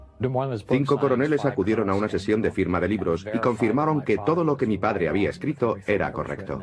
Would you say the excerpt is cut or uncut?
cut